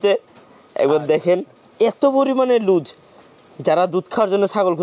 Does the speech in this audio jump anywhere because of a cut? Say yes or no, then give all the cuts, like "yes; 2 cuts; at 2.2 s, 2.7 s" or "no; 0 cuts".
no; 0 cuts